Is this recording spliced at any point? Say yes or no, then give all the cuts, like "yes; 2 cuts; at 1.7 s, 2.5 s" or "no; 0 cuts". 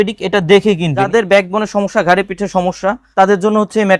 yes; 2 cuts; at 1.1 s, 3.0 s